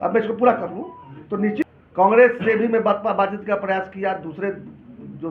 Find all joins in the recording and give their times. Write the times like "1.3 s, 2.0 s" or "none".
1.7 s